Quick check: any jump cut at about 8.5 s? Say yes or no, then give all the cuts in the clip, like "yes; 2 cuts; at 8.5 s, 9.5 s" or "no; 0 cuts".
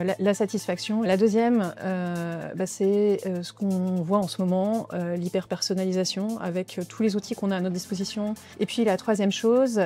yes; 2 cuts; at 1.0 s, 8.5 s